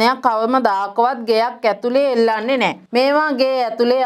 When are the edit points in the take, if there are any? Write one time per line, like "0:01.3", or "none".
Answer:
0:02.8